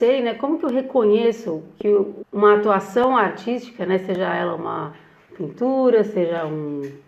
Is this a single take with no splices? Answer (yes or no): no